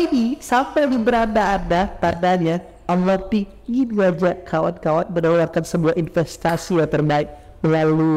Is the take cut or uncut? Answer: uncut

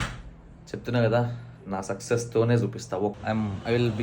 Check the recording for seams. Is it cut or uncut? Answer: cut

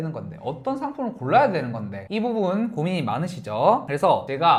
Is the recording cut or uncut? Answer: uncut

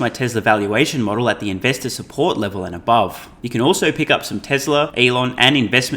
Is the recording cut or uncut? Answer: cut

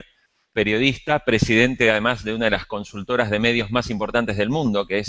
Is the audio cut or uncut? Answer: cut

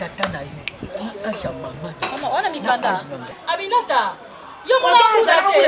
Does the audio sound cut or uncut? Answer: cut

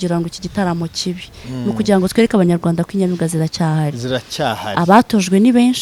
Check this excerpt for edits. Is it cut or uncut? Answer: uncut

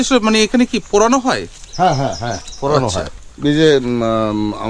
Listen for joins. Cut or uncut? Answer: cut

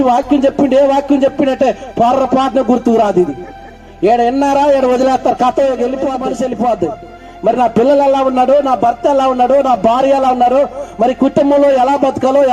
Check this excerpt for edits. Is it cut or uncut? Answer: cut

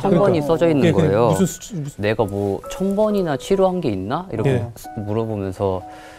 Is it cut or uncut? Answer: cut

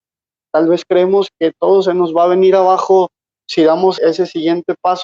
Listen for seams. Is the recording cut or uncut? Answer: cut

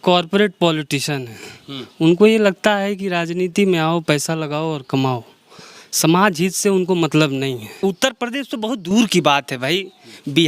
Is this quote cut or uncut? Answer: cut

